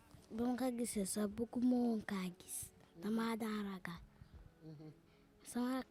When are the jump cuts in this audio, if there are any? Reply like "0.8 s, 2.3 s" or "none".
none